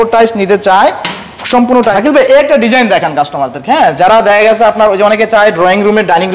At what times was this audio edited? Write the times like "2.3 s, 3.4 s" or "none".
2.0 s